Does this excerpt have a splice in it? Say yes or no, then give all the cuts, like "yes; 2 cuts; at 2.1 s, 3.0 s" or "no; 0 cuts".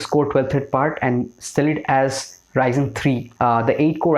yes; 1 cut; at 3.3 s